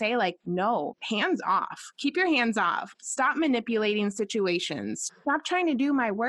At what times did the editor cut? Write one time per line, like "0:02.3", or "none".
0:00.8
0:02.9
0:05.0